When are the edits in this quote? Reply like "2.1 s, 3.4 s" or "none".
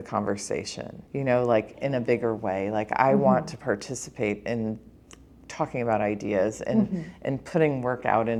none